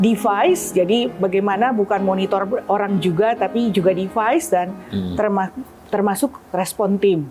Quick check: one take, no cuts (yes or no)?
yes